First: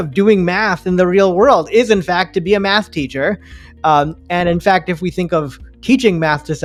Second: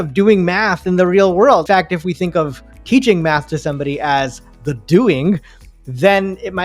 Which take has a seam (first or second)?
second